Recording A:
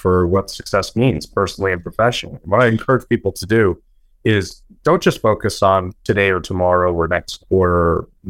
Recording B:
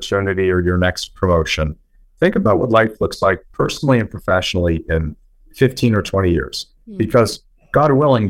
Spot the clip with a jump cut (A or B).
A